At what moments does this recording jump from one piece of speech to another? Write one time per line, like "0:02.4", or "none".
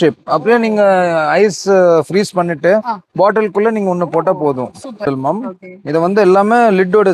0:05.0